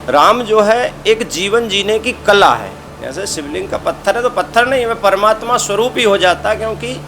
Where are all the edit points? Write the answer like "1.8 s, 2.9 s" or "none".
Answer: 2.8 s